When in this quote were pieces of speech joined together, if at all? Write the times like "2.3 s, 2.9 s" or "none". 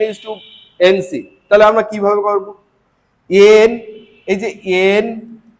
none